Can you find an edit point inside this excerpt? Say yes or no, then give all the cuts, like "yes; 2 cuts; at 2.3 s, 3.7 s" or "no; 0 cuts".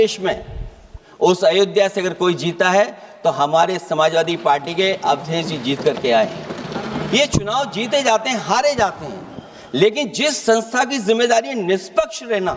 no; 0 cuts